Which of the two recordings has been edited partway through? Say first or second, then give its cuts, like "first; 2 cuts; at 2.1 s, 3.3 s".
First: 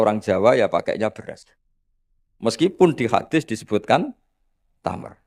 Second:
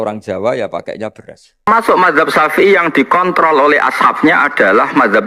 second; 1 cut; at 1.7 s